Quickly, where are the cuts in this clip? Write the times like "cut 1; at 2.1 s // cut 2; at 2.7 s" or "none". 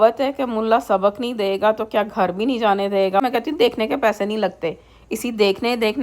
cut 1; at 3.2 s